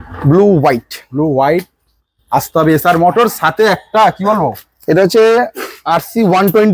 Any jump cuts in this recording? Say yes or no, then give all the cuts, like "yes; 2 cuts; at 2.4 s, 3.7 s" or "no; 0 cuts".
no; 0 cuts